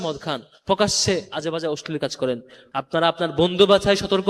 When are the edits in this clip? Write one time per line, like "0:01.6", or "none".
0:02.6